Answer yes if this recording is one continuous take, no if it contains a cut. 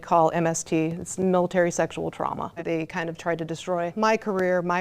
no